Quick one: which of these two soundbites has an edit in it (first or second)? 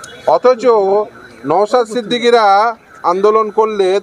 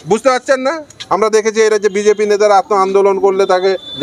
second